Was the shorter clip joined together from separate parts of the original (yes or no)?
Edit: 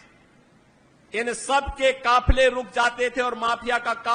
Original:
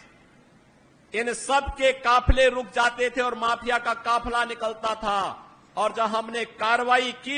no